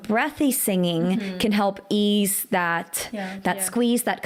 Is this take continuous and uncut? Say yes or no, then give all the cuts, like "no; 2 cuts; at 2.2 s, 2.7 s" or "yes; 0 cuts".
yes; 0 cuts